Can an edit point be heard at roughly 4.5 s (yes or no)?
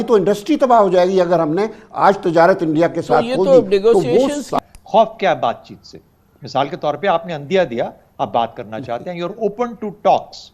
yes